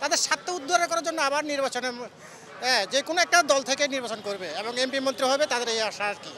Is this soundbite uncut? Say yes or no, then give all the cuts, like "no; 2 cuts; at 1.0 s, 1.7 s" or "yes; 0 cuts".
yes; 0 cuts